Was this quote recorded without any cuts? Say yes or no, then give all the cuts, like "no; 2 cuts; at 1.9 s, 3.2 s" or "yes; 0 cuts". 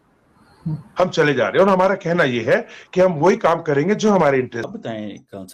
no; 1 cut; at 4.5 s